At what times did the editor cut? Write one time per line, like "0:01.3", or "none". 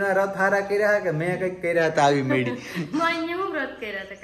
none